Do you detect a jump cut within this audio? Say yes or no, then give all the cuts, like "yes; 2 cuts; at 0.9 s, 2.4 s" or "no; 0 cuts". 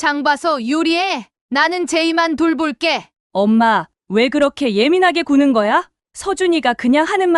yes; 1 cut; at 3.1 s